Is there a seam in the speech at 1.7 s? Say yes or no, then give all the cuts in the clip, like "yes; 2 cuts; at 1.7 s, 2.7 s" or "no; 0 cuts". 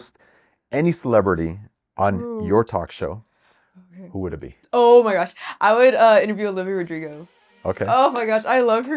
no; 1 cut; at 4.6 s